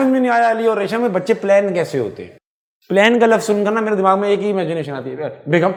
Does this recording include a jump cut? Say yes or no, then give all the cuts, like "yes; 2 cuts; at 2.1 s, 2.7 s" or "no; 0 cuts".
no; 0 cuts